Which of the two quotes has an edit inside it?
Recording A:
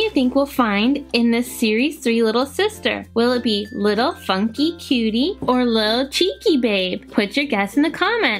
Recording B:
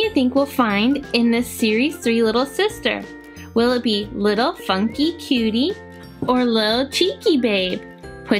A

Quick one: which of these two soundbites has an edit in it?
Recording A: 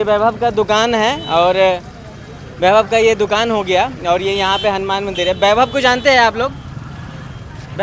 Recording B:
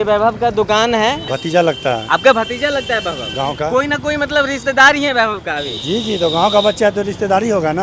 B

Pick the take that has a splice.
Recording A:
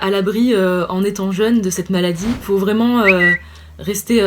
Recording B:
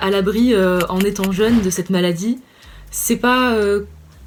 A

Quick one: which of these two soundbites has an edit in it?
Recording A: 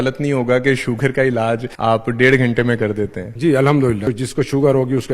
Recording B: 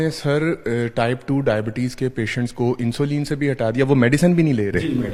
A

